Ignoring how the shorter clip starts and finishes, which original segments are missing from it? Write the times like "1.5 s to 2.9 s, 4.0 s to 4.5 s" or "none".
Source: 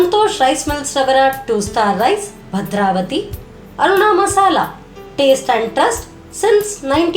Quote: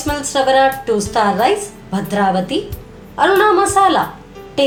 none